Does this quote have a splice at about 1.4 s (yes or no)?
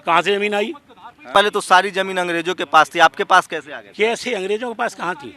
yes